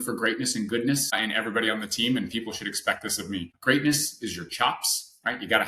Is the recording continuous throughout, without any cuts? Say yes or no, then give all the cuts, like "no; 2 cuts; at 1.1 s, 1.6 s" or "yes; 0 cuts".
no; 2 cuts; at 1.2 s, 3.5 s